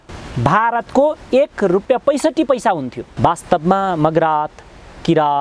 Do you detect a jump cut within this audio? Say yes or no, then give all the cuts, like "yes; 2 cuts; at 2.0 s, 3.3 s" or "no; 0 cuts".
yes; 2 cuts; at 1.8 s, 3.0 s